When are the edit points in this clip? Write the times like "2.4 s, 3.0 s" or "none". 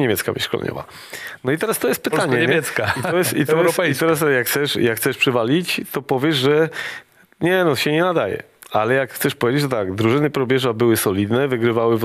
none